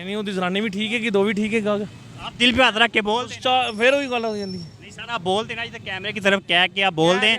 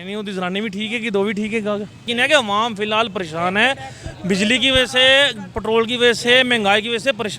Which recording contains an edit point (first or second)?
second